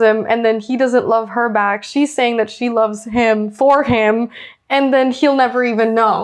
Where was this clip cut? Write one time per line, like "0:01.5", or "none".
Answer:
none